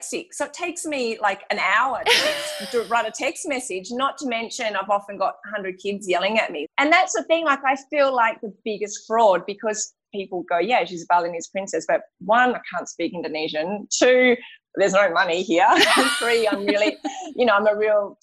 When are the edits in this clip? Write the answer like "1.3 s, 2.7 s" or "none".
6.8 s, 10.0 s